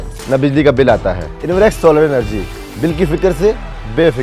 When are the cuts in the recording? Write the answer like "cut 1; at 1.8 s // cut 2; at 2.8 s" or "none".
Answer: cut 1; at 1.3 s